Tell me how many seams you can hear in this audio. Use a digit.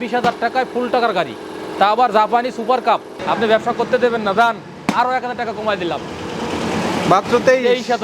1